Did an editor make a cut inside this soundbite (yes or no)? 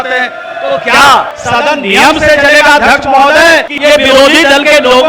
yes